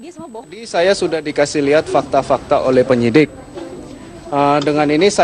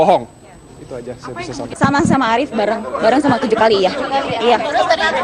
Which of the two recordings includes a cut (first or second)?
first